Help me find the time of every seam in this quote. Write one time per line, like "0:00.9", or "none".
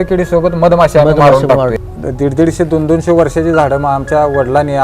0:01.7